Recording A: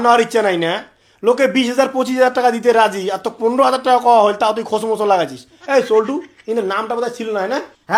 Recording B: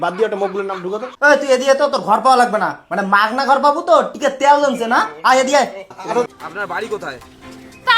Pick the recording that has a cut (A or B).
B